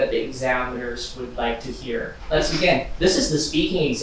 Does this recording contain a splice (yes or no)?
yes